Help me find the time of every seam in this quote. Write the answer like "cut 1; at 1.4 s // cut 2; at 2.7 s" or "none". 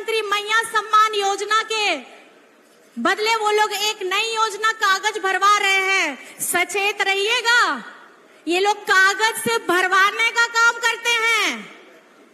none